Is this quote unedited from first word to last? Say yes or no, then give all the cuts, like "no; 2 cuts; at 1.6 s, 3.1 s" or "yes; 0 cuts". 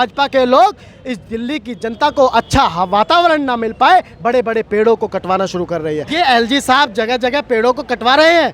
no; 1 cut; at 6.1 s